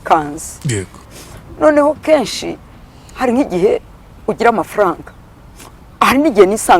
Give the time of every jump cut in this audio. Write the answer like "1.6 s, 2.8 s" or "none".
1.0 s